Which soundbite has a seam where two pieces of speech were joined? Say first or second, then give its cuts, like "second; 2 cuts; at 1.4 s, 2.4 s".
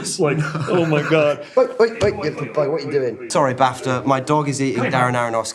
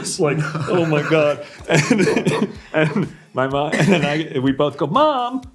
first; 1 cut; at 1.4 s